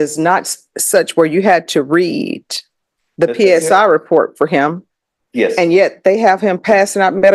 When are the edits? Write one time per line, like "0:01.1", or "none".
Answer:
none